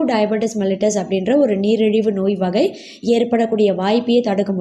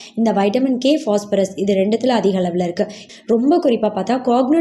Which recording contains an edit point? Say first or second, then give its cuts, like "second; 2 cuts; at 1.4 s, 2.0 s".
second; 1 cut; at 3.0 s